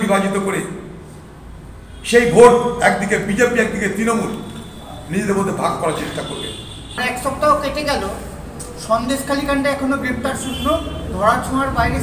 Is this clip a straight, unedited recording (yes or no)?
no